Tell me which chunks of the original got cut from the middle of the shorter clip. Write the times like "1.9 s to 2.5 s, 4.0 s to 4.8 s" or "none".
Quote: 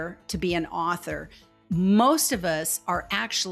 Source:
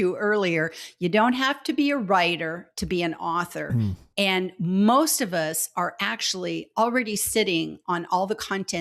4.1 s to 4.5 s

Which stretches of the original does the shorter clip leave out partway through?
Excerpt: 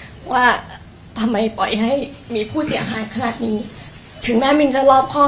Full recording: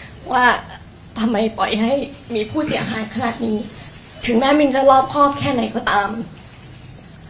none

